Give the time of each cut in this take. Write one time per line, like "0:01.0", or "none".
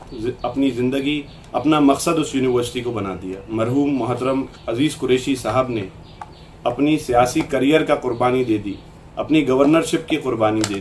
0:03.4